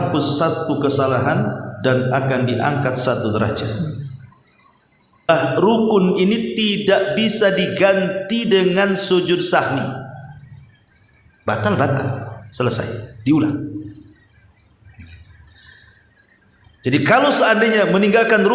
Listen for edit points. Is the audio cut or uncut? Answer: cut